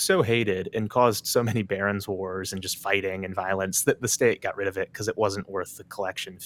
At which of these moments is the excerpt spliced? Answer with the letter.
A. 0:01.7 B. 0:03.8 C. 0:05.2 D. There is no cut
D